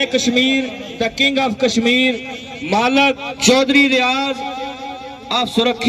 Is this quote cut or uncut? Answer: cut